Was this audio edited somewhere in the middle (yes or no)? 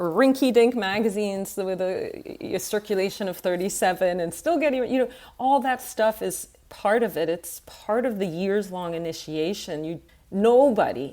yes